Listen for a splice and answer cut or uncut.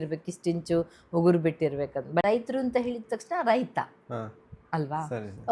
cut